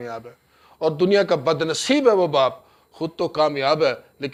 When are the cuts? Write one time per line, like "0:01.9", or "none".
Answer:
none